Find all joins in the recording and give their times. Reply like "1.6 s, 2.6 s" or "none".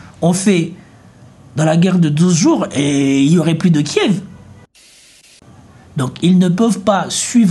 4.9 s